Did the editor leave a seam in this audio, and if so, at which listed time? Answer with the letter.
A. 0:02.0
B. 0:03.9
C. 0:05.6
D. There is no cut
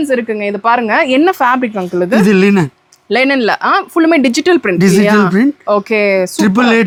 D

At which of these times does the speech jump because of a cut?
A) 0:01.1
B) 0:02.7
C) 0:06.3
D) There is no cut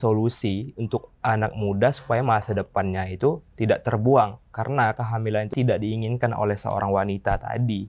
D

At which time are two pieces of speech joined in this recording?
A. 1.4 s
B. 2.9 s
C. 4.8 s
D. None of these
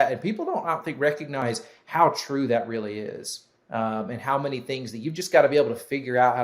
A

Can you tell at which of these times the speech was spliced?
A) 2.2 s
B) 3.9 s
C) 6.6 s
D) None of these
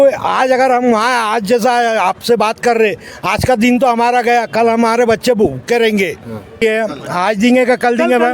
C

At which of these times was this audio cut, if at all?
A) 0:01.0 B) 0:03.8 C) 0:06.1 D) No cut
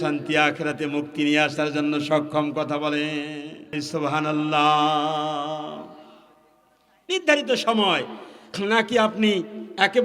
B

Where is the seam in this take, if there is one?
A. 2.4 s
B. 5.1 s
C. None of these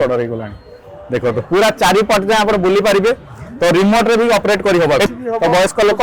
B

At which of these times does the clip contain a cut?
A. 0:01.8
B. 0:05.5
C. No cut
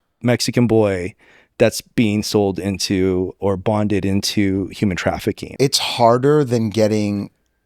B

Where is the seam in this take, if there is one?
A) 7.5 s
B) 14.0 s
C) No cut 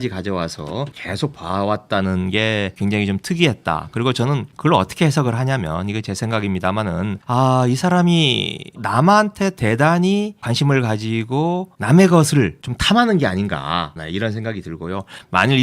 B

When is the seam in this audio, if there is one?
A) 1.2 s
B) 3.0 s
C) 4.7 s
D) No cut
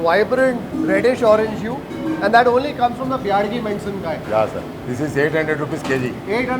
C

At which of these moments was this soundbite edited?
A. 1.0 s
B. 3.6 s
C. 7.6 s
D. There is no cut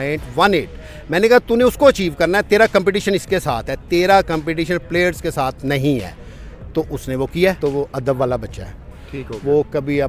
C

